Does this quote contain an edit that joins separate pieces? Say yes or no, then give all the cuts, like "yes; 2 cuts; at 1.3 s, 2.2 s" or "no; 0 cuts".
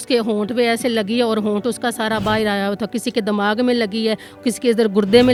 no; 0 cuts